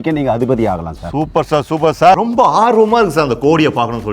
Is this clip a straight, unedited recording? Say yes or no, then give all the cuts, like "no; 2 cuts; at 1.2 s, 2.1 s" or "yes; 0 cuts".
no; 1 cut; at 2.2 s